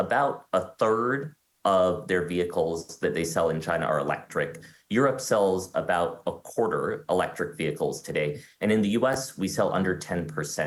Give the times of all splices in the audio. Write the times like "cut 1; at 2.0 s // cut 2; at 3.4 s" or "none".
none